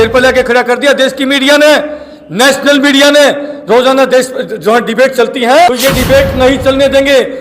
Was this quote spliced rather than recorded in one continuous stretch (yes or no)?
yes